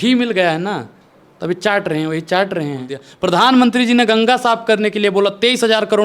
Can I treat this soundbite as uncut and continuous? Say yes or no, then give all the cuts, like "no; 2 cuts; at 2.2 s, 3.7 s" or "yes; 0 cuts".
no; 1 cut; at 3.0 s